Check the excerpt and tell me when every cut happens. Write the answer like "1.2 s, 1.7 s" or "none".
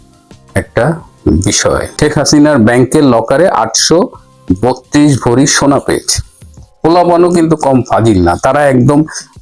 1.9 s